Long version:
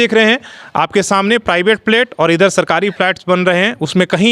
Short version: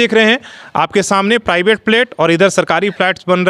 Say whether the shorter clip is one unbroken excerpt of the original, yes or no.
yes